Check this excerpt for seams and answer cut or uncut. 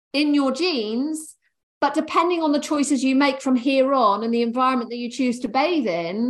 uncut